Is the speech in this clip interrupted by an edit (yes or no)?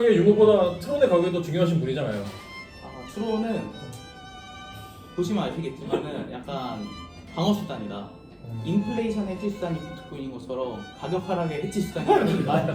no